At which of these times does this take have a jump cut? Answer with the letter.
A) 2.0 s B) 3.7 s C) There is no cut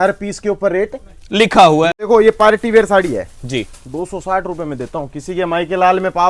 A